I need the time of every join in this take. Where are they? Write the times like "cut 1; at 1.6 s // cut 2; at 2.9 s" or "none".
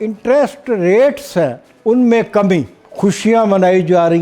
cut 1; at 1.7 s // cut 2; at 2.8 s